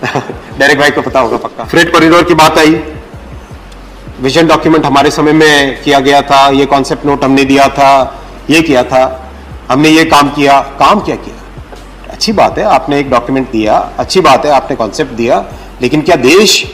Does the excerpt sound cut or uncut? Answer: cut